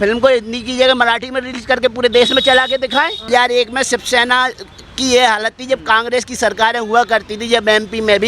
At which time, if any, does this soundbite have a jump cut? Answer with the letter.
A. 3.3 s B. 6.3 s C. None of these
A